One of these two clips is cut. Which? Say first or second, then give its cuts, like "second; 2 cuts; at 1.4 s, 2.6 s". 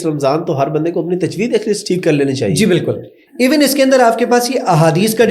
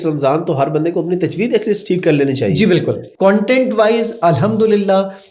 second; 1 cut; at 3.1 s